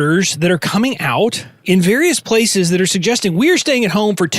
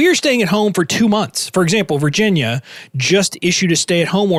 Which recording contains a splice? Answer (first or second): first